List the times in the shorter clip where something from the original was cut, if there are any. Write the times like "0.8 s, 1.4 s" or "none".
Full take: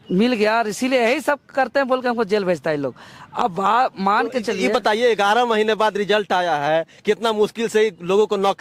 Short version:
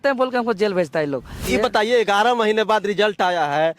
1.4 s